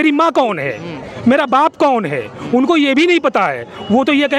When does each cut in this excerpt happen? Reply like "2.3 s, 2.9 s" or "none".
none